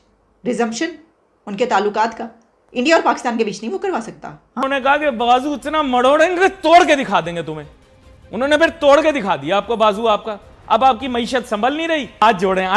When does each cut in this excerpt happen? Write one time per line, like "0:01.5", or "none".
0:04.6